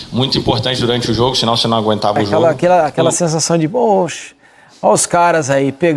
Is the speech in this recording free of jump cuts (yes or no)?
no